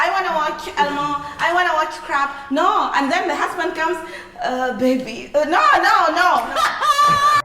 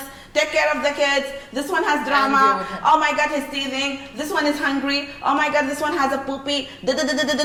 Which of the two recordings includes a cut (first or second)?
first